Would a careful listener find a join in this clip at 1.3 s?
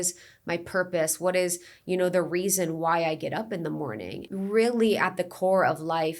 no; 1 cut; at 4.1 s

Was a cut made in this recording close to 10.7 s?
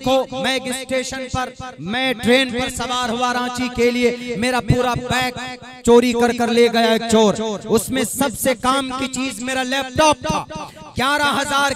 no; 0 cuts

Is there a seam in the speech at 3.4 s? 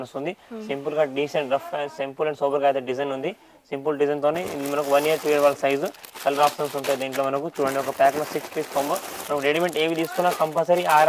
no; 0 cuts

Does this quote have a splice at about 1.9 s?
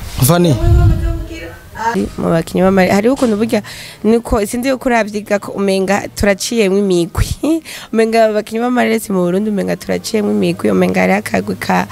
yes; 1 cut; at 1.9 s

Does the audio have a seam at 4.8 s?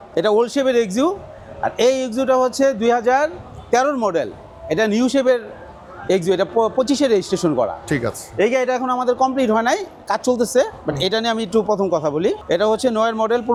no; 0 cuts

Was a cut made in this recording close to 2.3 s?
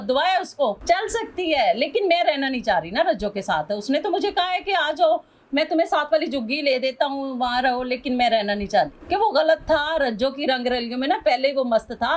no; 2 cuts; at 0.8 s, 9.0 s

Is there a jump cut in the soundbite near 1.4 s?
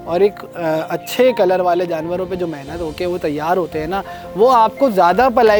no; 0 cuts

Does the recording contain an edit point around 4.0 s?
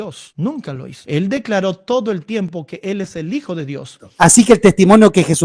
yes; 1 cut; at 4.0 s

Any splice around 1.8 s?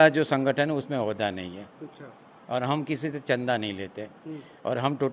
no; 0 cuts

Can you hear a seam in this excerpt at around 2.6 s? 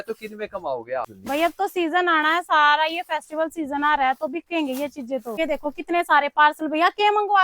no; 2 cuts; at 1.2 s, 5.4 s

